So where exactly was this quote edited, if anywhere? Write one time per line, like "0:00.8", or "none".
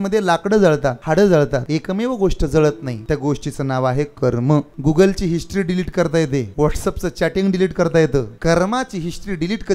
0:01.0
0:01.6
0:02.9
0:04.7
0:06.5
0:08.3

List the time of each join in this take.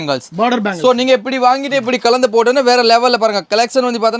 none

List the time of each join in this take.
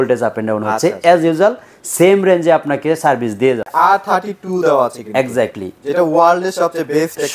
0:03.7

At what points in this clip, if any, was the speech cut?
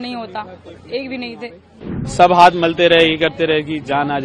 0:01.9

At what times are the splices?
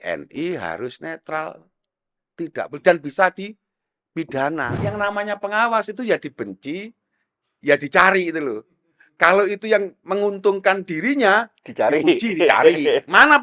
0:04.8

